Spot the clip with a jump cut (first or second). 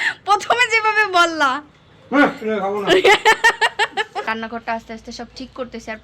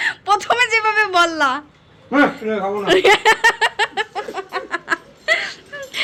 first